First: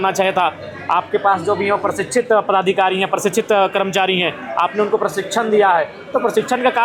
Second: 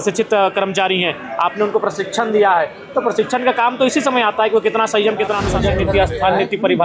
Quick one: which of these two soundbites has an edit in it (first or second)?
second